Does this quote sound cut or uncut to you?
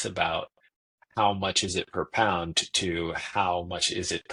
uncut